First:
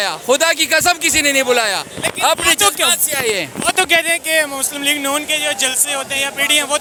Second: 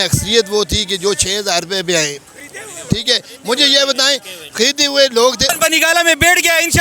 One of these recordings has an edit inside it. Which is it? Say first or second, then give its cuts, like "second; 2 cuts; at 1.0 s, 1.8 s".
second; 1 cut; at 5.5 s